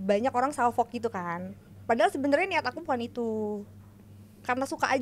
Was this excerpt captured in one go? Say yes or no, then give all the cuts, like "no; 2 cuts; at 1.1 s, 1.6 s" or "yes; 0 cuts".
yes; 0 cuts